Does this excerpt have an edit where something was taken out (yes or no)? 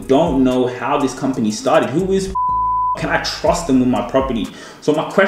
no